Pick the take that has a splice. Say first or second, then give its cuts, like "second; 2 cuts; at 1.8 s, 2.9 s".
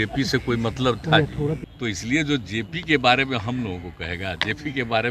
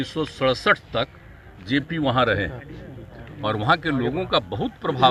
first; 1 cut; at 1.7 s